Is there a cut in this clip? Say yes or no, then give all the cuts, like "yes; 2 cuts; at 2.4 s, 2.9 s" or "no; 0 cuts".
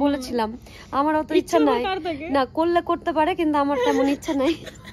no; 0 cuts